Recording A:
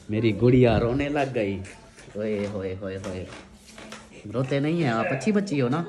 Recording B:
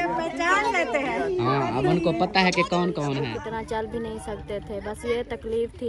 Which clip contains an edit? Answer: B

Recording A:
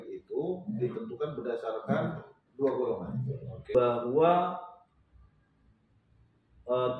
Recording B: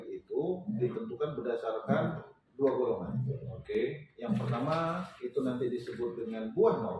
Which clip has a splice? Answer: A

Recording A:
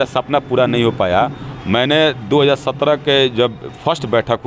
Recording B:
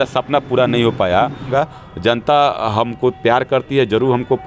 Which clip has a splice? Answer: A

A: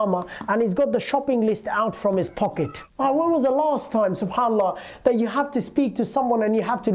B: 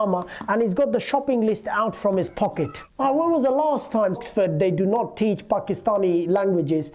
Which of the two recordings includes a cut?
B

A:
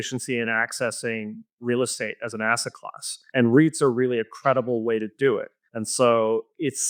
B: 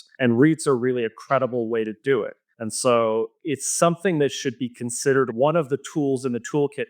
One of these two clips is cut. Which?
B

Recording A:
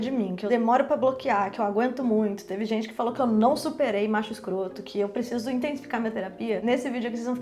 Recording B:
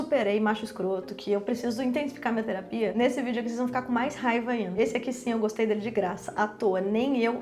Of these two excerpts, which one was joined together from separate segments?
B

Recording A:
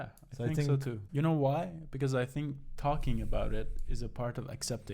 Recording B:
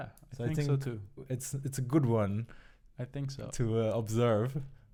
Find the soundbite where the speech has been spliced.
A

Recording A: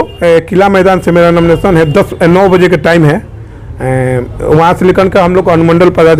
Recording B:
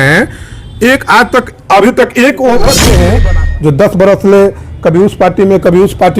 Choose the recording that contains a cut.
B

